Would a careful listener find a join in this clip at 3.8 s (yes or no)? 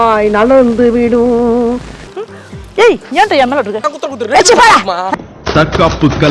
yes